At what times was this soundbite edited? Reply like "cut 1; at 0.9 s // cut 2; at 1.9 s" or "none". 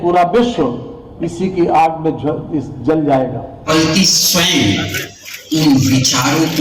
cut 1; at 3.7 s